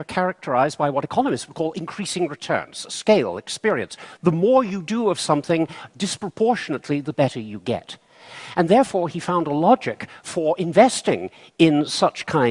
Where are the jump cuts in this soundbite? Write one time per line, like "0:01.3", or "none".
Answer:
0:05.1